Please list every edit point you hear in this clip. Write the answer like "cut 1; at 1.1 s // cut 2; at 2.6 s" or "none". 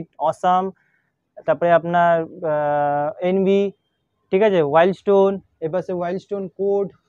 none